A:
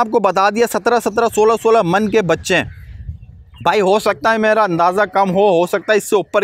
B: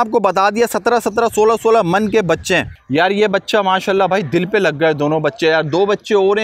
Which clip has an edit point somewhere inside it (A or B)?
B